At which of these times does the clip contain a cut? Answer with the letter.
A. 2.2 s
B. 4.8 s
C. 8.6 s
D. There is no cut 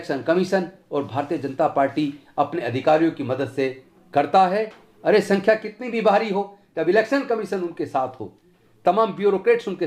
B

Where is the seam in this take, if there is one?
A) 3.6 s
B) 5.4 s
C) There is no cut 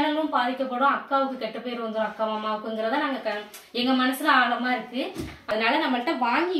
B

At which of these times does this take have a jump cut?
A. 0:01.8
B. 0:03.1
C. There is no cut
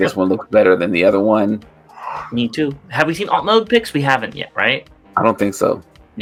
C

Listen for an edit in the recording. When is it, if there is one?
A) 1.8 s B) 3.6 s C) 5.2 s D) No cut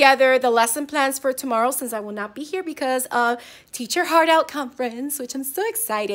D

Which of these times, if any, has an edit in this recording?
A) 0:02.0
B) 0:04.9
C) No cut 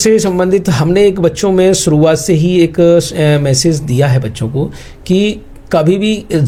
C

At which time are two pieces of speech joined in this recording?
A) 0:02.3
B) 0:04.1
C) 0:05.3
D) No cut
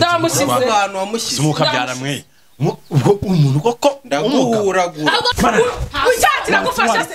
C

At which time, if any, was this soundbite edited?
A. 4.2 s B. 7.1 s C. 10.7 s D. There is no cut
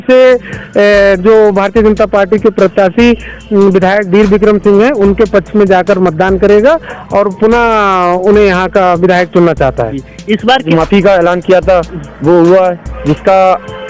C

